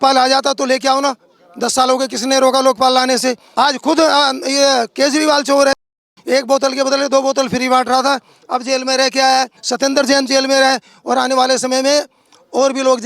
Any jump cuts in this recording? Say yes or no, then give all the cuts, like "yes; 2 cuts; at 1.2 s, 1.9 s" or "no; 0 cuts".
yes; 1 cut; at 3.4 s